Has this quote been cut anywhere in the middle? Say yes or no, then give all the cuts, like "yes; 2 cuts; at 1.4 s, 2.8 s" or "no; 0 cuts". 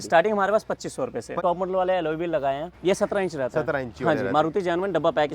yes; 2 cuts; at 1.4 s, 2.7 s